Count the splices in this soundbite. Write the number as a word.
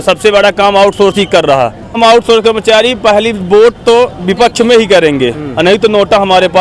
one